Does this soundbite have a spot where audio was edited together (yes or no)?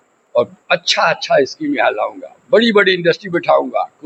no